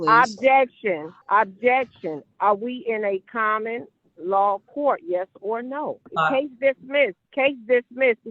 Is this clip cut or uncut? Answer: cut